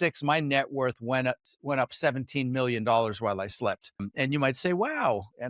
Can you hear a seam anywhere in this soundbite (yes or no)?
yes